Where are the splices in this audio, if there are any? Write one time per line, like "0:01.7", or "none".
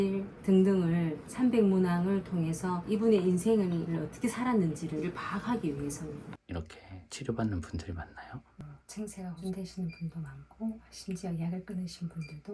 0:06.3
0:08.6